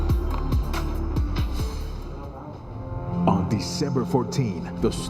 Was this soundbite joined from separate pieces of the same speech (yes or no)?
yes